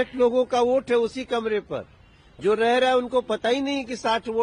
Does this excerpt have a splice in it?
no; 0 cuts

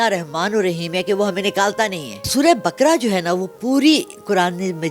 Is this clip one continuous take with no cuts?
no; 1 cut; at 2.3 s

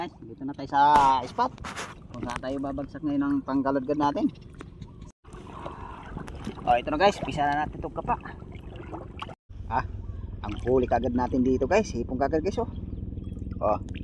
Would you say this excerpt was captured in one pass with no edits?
no; 2 cuts; at 5.1 s, 9.3 s

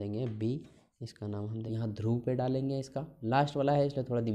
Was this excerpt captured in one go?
no; 1 cut; at 1.6 s

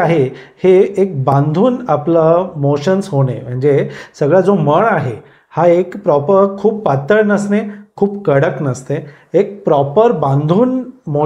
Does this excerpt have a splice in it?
no; 0 cuts

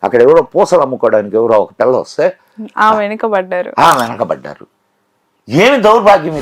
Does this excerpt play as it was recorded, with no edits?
yes; 0 cuts

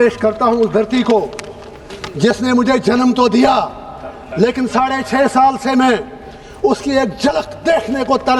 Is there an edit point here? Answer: no; 0 cuts

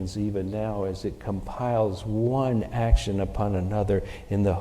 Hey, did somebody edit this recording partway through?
no; 0 cuts

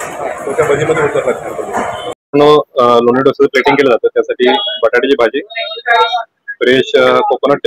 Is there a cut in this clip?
yes; 1 cut; at 2.1 s

